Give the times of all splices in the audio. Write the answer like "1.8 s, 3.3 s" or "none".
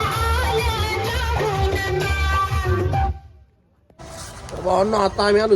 4.0 s